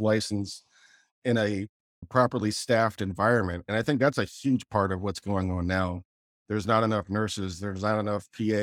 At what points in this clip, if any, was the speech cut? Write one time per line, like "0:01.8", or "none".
none